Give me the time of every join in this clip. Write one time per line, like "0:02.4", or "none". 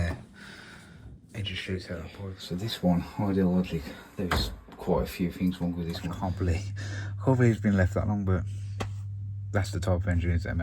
0:02.3
0:06.1